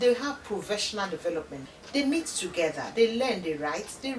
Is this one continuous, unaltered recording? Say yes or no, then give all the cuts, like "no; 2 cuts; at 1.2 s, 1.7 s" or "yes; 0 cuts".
no; 1 cut; at 1.6 s